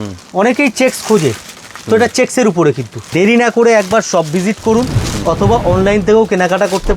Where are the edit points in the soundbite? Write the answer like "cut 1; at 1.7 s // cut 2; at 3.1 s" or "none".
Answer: cut 1; at 3.0 s

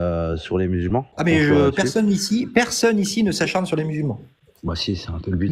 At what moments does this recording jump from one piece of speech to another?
cut 1; at 1.1 s

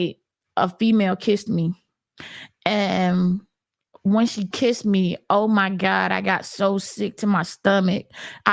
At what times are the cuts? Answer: none

